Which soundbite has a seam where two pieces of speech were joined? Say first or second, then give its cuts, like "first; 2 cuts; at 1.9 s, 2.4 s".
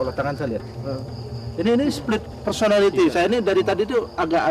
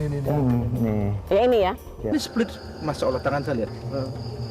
second; 1 cut; at 2.1 s